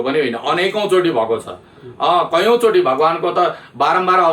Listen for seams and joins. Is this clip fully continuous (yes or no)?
yes